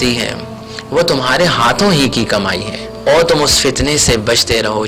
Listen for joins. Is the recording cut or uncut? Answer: cut